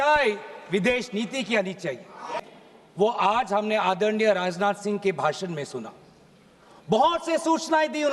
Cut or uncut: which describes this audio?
cut